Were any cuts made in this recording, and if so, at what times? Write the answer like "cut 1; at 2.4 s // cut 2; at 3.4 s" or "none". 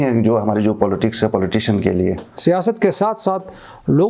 cut 1; at 2.3 s